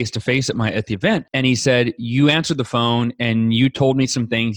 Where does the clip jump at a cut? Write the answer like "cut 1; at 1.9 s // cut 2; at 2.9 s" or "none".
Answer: cut 1; at 1.3 s